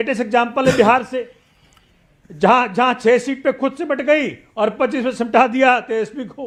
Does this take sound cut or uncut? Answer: uncut